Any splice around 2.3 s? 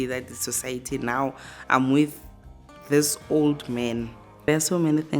no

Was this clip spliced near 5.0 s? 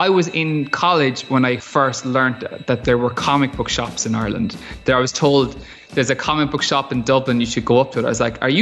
no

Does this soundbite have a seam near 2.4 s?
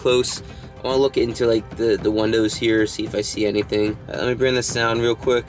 no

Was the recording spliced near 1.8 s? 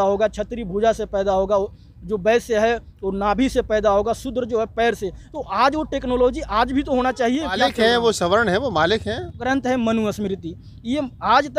no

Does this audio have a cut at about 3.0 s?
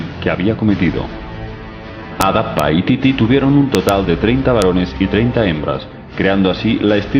yes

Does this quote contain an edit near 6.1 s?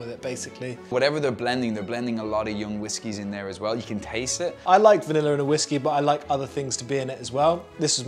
no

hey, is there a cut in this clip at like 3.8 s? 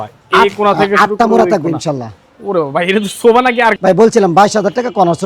yes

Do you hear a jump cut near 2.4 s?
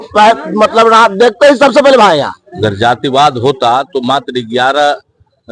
yes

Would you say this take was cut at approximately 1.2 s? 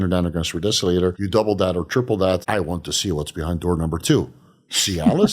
yes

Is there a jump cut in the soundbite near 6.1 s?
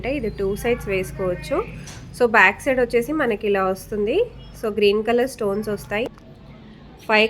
yes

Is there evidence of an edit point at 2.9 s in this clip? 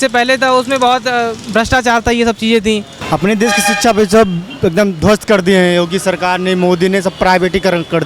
yes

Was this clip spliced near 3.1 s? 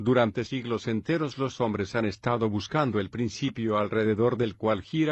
yes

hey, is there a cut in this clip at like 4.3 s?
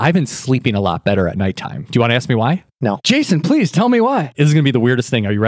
yes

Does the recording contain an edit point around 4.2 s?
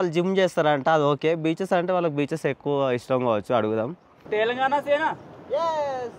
yes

